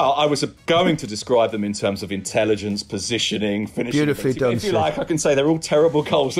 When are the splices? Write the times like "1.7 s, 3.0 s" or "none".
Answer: none